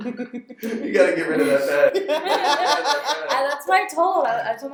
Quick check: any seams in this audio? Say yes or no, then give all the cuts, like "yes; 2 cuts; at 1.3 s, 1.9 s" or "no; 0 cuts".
no; 0 cuts